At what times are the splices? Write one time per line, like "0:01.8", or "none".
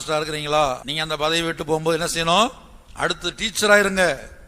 0:00.9